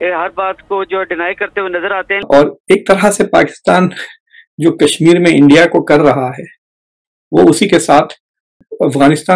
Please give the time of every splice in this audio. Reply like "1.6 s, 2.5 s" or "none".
2.2 s, 8.6 s